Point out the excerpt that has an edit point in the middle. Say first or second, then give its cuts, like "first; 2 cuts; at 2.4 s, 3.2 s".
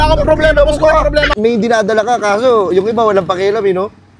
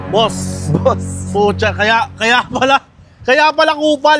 first; 1 cut; at 1.3 s